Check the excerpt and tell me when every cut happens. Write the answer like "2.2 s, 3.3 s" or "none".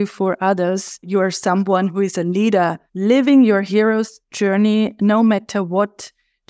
1.1 s, 2.9 s